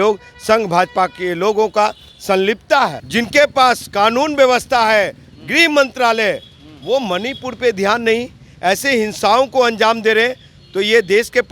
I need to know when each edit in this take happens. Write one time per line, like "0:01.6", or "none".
0:03.0